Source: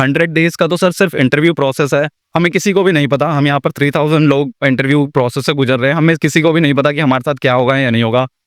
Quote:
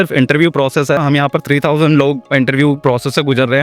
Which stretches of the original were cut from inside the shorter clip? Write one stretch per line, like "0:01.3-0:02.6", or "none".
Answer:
0:02.0-0:03.3